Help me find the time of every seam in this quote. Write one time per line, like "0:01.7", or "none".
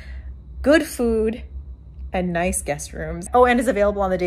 0:03.3